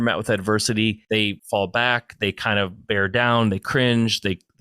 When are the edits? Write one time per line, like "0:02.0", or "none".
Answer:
0:01.2